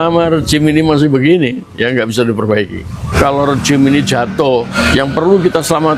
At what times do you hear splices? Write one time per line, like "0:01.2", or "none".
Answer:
0:03.1
0:04.7